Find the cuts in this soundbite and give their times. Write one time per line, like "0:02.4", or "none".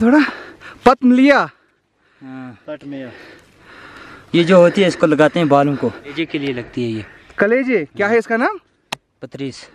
0:06.1